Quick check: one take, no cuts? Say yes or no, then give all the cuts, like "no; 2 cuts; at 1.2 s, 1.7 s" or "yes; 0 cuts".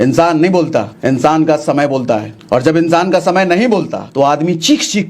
no; 3 cuts; at 0.9 s, 2.3 s, 4.0 s